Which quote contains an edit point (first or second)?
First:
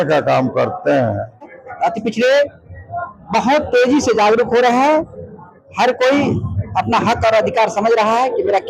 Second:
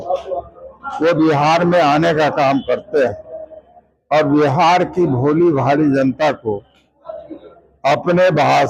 first